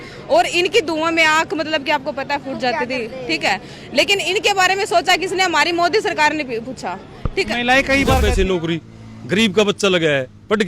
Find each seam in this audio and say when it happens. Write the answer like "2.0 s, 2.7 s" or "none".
8.2 s